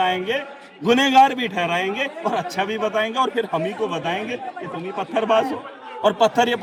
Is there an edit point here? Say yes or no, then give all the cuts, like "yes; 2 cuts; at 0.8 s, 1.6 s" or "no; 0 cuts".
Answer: no; 0 cuts